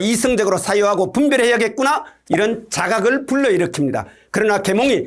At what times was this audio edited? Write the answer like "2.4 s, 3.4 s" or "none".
2.2 s